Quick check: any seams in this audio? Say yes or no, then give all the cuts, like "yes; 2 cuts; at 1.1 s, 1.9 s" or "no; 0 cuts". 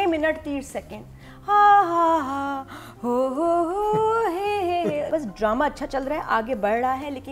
yes; 1 cut; at 5.1 s